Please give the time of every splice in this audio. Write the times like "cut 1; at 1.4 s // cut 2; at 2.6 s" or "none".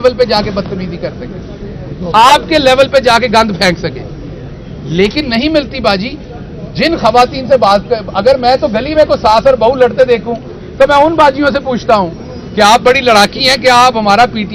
none